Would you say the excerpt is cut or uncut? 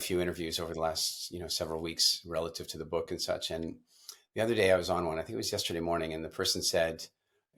uncut